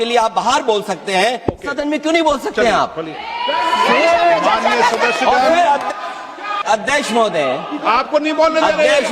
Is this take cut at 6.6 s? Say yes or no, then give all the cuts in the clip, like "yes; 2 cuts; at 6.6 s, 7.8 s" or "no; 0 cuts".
yes; 1 cut; at 6.6 s